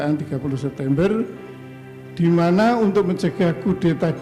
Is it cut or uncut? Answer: uncut